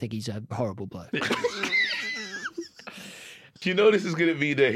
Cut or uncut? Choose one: cut